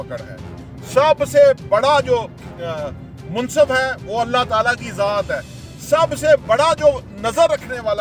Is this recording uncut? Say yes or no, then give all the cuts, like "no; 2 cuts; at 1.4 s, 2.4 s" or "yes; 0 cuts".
yes; 0 cuts